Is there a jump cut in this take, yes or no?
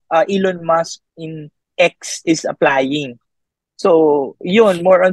no